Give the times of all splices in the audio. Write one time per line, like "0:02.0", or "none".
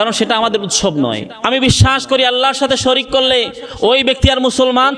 0:01.3